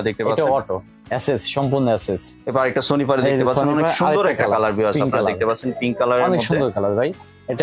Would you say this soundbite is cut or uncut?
cut